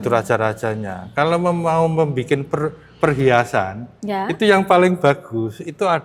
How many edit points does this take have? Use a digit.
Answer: 0